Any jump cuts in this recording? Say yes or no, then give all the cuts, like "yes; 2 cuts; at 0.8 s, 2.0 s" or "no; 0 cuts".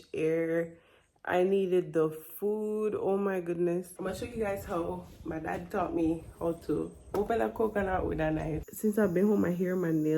yes; 2 cuts; at 3.9 s, 8.6 s